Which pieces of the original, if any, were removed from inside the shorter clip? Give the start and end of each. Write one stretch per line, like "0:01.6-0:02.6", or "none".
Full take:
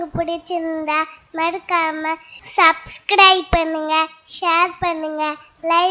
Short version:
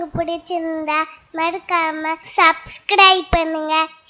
0:02.2-0:02.4